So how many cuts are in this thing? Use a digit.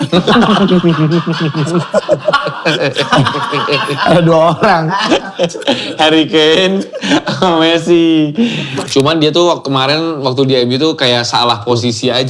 1